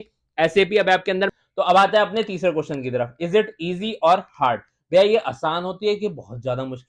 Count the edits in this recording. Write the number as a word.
one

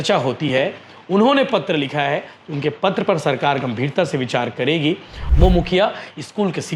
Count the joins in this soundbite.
one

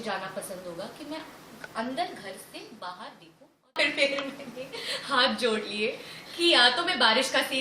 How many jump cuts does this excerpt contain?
one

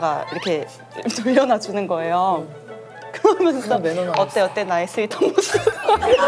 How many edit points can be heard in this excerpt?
zero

